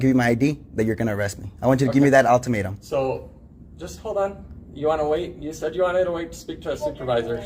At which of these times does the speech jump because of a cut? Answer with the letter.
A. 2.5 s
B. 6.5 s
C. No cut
C